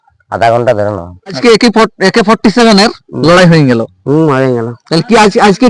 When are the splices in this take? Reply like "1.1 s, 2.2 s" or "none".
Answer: 1.4 s